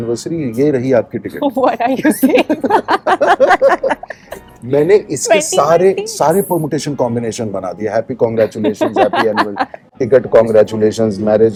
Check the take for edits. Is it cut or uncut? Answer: uncut